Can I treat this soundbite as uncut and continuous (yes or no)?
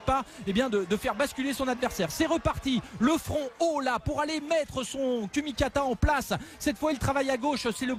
yes